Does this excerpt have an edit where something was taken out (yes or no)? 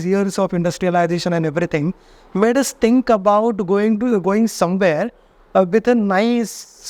no